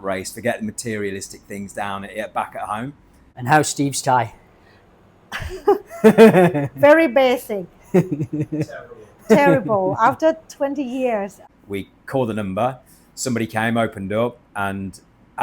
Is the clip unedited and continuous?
no; 2 cuts; at 3.3 s, 11.4 s

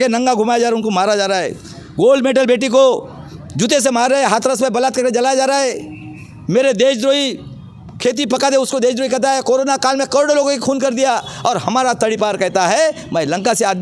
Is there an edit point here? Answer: no; 0 cuts

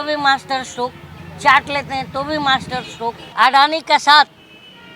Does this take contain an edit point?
yes; 1 cut; at 3.2 s

